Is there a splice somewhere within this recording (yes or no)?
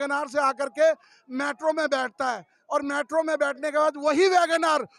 no